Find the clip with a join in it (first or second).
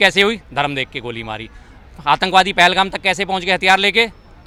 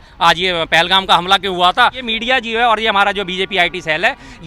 second